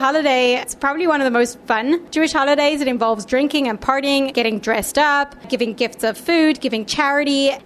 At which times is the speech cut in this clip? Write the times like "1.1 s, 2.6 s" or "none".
2.1 s